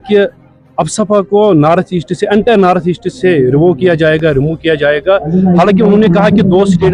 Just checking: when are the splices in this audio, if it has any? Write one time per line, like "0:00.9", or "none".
none